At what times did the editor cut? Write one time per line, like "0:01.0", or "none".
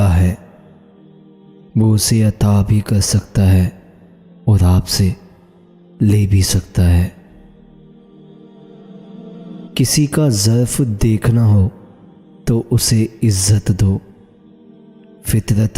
0:07.6
0:09.7